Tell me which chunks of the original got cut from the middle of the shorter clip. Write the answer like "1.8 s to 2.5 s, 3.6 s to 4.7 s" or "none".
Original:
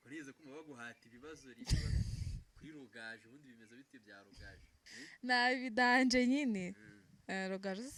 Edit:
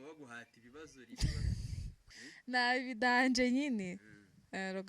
2.4 s to 4.7 s